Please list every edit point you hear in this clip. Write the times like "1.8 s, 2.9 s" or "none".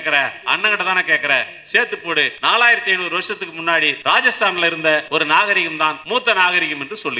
2.3 s, 4.0 s, 5.1 s, 6.0 s